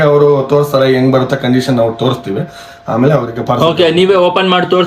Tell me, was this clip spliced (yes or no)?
no